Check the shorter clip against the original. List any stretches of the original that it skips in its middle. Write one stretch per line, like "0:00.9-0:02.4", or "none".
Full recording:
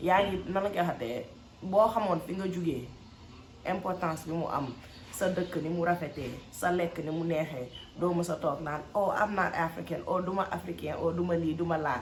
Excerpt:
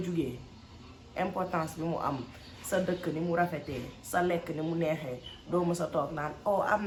none